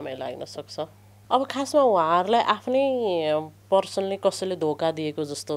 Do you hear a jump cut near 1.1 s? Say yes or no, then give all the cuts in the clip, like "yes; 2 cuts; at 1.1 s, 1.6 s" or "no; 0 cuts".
yes; 1 cut; at 1.1 s